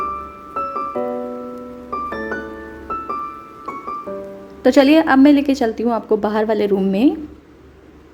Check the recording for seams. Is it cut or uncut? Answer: uncut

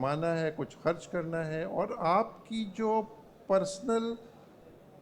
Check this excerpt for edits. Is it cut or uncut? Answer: uncut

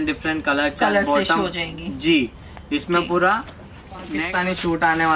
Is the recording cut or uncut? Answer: cut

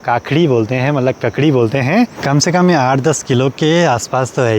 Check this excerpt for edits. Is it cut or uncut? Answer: cut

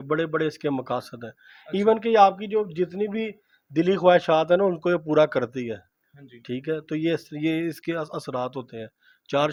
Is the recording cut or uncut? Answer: uncut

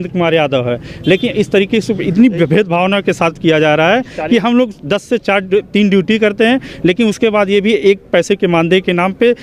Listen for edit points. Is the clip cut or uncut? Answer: uncut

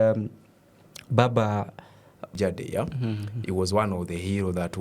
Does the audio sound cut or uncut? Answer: cut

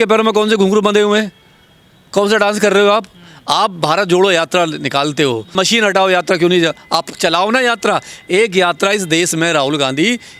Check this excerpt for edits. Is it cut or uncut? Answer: uncut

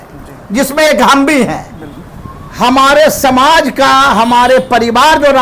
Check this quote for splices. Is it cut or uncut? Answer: cut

